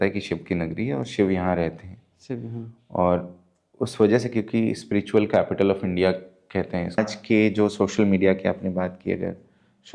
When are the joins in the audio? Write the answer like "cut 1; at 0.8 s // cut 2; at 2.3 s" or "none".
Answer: cut 1; at 7.0 s